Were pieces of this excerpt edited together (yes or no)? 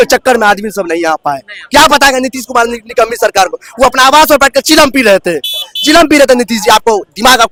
no